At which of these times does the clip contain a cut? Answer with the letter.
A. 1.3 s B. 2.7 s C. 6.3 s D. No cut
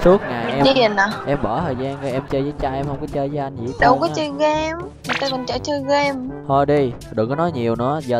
C